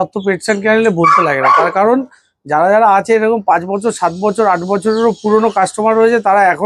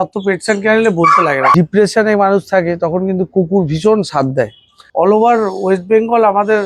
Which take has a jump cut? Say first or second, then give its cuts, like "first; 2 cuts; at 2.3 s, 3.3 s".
second; 2 cuts; at 1.5 s, 4.8 s